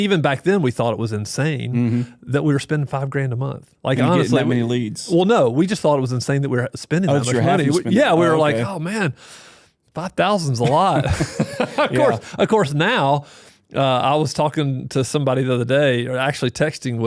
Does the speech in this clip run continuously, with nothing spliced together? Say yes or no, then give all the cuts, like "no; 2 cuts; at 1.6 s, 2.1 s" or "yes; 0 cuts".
yes; 0 cuts